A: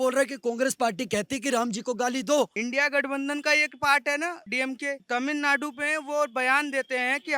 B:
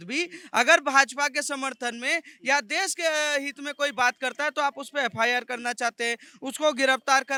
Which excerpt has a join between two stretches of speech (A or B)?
A